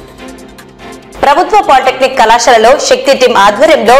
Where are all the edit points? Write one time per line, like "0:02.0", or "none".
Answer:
0:01.0